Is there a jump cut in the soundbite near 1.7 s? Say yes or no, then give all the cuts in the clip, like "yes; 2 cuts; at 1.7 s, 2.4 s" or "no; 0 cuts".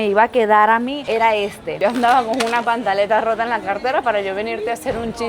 yes; 1 cut; at 1.7 s